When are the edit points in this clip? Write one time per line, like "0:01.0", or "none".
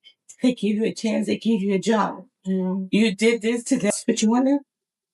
0:03.9